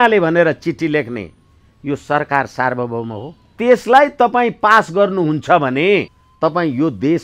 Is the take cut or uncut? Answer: cut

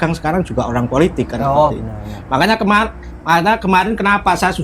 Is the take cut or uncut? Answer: uncut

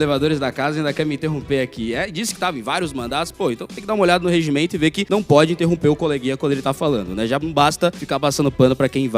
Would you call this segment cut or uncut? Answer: uncut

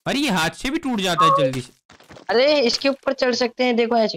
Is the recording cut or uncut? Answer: uncut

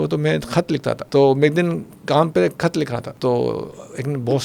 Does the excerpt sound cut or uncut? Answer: cut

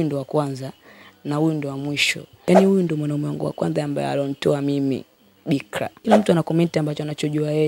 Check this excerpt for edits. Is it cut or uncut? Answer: cut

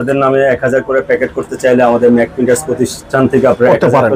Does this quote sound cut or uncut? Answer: uncut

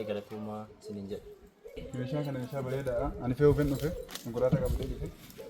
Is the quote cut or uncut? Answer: uncut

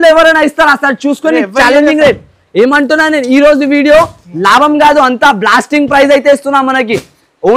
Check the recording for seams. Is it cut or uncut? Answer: uncut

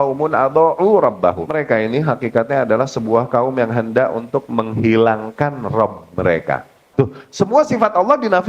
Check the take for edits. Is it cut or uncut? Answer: cut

